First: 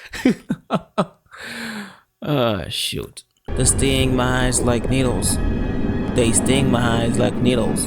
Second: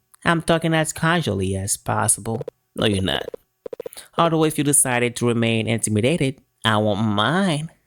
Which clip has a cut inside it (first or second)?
first